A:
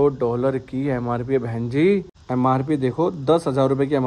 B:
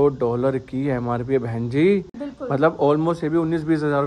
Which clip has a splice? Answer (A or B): A